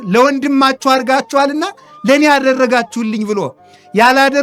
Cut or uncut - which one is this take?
uncut